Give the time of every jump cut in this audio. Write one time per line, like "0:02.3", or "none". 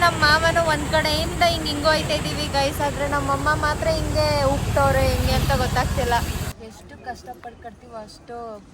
0:06.4

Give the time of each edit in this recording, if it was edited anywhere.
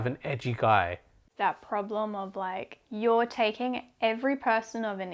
0:01.3
0:02.8

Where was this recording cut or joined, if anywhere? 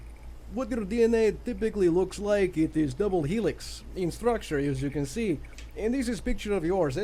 none

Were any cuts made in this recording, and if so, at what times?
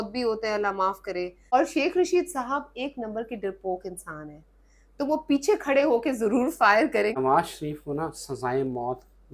0:01.5
0:07.2

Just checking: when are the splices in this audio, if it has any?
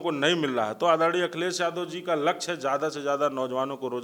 none

